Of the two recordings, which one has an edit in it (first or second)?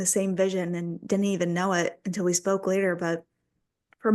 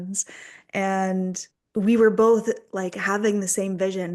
second